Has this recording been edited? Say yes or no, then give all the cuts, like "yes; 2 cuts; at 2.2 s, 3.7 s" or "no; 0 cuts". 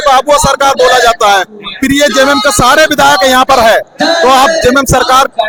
no; 0 cuts